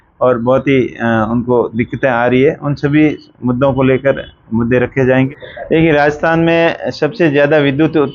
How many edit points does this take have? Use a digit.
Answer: 1